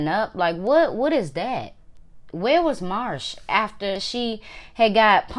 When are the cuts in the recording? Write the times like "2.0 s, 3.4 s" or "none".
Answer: none